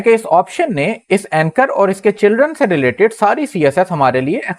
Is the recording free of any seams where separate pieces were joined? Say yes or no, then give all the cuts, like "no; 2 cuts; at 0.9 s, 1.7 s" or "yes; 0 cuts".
yes; 0 cuts